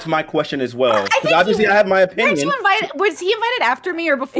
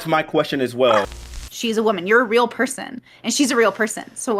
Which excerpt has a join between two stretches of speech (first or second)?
second